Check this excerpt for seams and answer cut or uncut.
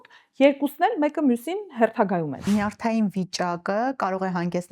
cut